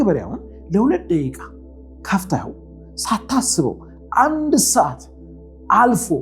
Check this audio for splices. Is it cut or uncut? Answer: uncut